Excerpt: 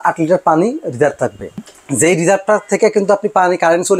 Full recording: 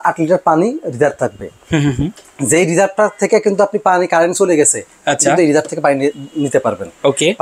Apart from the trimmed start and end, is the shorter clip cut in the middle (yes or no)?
yes